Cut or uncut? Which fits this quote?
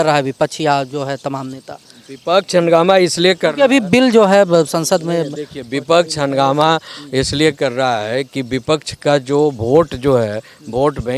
uncut